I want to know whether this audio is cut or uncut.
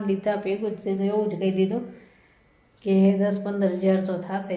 uncut